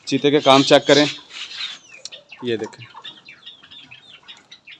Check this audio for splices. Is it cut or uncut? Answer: uncut